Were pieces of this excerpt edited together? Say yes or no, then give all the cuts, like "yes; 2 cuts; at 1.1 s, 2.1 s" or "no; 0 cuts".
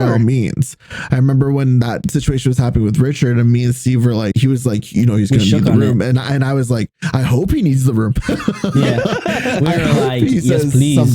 yes; 2 cuts; at 2.0 s, 4.3 s